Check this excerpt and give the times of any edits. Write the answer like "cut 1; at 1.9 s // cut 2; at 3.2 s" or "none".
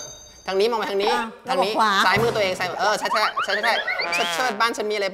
cut 1; at 4.1 s